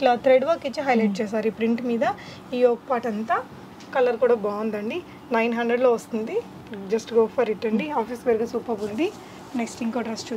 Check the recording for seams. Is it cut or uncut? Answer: uncut